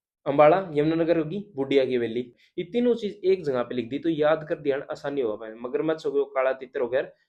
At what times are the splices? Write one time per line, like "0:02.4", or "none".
0:02.4